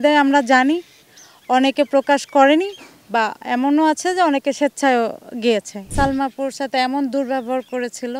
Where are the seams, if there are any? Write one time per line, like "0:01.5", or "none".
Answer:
0:05.8